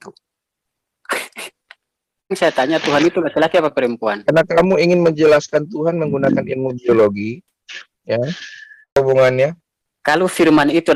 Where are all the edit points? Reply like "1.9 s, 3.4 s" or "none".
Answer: 2.4 s, 9.0 s